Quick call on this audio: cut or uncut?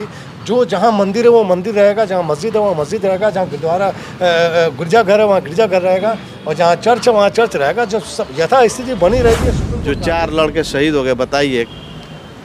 cut